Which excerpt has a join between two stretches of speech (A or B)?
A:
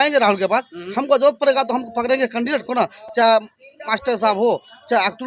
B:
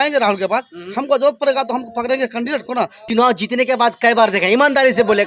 B